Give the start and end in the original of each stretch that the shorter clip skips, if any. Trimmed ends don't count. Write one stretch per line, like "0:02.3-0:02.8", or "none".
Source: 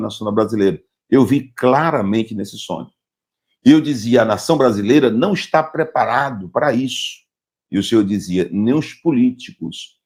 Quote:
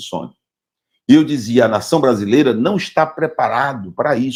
none